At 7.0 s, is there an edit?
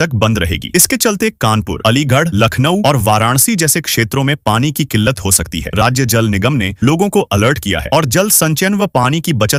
no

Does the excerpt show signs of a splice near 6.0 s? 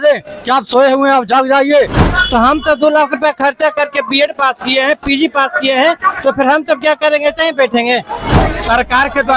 no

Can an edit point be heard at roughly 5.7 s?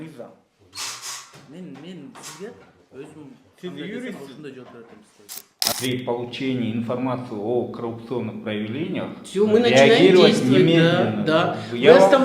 yes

